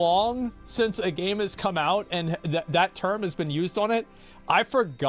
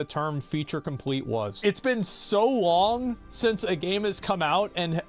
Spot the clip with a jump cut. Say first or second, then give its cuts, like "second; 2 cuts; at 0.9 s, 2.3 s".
second; 1 cut; at 1.6 s